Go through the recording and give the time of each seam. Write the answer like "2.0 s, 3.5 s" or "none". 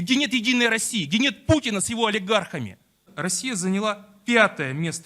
3.1 s